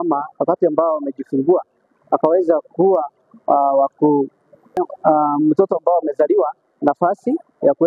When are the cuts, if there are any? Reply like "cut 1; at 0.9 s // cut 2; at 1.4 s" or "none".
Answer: cut 1; at 4.8 s